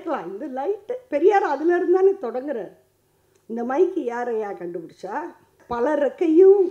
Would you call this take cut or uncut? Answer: cut